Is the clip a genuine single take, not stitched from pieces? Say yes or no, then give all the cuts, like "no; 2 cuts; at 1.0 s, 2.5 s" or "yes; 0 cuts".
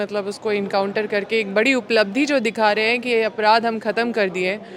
yes; 0 cuts